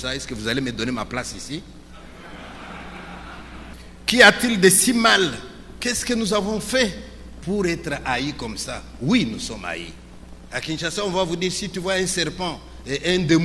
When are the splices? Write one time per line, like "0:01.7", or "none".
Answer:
0:03.8